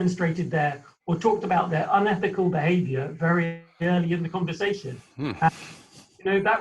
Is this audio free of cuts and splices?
yes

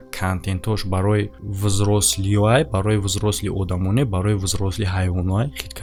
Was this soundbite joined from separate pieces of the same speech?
no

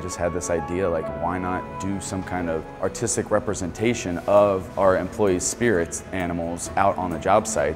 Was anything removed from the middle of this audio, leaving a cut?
yes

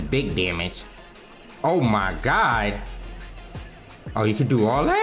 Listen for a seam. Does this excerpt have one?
no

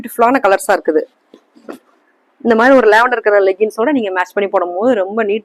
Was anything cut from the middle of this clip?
no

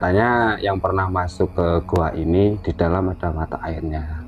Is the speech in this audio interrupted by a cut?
no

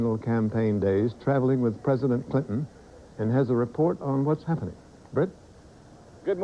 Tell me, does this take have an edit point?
no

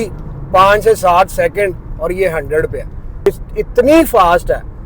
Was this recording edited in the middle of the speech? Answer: yes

